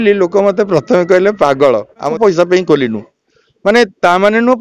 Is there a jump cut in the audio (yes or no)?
yes